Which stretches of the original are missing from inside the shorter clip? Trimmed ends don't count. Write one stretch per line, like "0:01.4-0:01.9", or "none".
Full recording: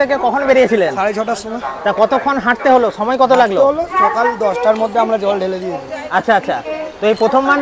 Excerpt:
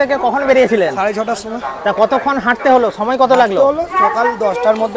none